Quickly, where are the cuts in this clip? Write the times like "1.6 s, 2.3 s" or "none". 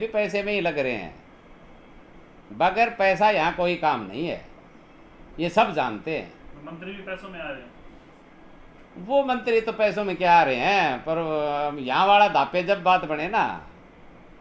none